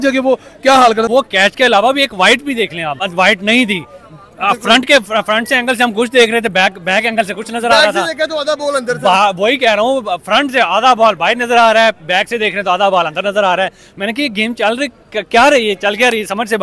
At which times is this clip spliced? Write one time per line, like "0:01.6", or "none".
0:01.1
0:03.0